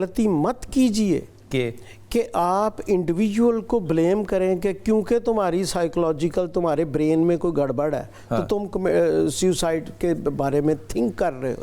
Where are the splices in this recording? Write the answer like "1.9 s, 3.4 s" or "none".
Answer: none